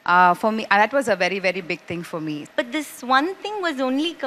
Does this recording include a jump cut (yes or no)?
yes